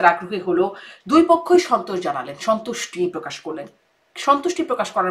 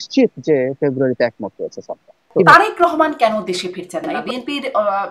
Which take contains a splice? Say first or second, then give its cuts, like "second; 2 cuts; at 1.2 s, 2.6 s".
second; 2 cuts; at 2.3 s, 4.1 s